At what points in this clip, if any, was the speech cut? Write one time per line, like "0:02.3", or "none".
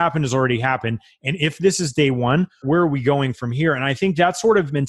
0:02.6

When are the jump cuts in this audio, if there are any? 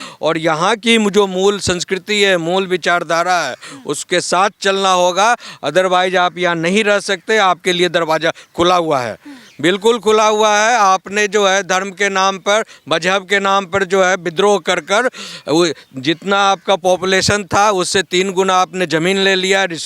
none

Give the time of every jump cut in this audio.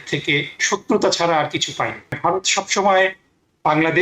0:02.2

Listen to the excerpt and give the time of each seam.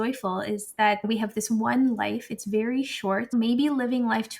0:01.0
0:03.3

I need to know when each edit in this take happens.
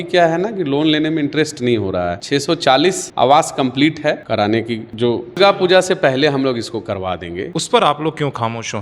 0:02.2
0:04.2
0:05.4
0:07.5

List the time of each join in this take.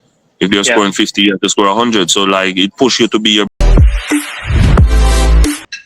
0:03.7

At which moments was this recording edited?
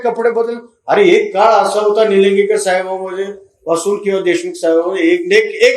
none

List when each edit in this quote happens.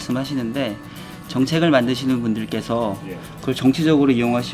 none

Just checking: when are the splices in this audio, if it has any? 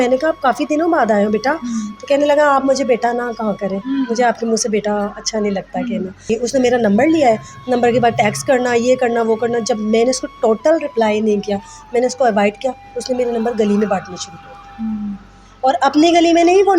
0:06.2

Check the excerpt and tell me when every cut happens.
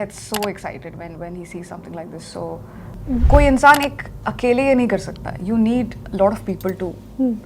0:02.9

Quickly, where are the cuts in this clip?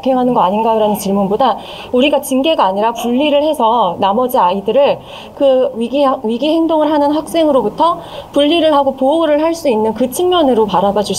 none

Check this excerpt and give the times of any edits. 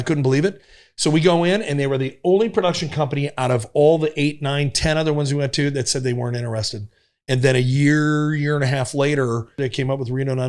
0:09.6

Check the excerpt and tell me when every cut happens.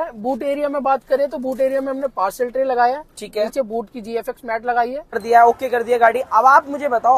0:05.2

